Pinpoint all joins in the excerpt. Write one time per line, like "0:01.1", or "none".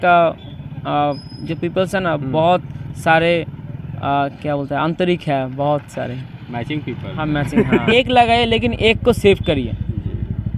0:07.9